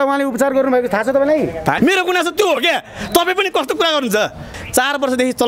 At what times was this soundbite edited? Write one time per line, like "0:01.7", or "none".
0:01.8
0:04.6